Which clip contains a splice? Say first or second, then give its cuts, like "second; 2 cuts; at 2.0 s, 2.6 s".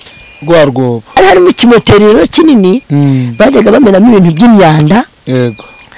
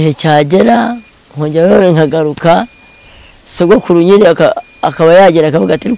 first; 1 cut; at 1.2 s